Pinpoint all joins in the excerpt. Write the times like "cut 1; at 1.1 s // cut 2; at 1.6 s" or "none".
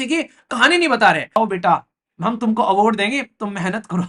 cut 1; at 1.4 s